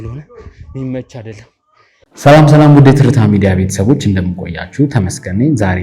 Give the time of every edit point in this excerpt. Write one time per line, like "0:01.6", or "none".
0:02.1